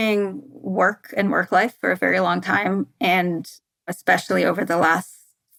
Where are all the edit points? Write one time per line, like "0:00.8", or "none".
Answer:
none